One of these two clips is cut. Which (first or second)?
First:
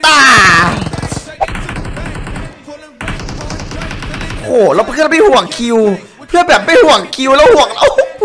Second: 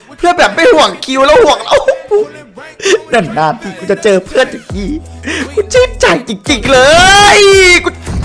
first